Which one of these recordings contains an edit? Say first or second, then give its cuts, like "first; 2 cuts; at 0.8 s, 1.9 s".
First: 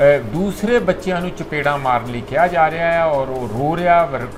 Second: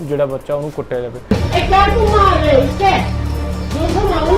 second; 1 cut; at 1.2 s